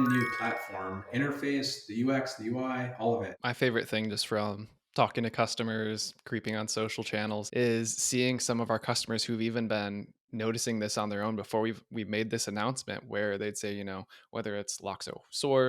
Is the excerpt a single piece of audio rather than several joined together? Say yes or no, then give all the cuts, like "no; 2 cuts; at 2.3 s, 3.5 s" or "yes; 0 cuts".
no; 3 cuts; at 1.1 s, 3.3 s, 7.5 s